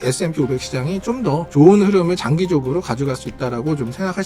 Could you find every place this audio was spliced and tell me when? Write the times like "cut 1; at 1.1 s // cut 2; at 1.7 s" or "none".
none